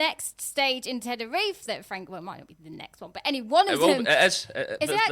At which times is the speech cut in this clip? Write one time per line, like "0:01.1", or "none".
none